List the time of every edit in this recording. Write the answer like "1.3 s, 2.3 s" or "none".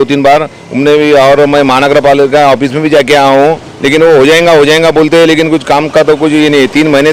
none